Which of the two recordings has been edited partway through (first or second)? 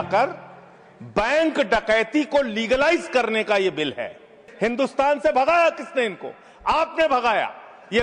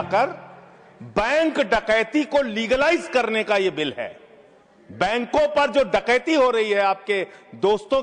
first